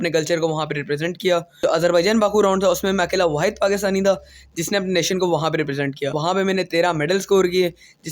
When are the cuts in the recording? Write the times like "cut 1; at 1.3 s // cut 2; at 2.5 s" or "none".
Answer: cut 1; at 1.6 s // cut 2; at 6.2 s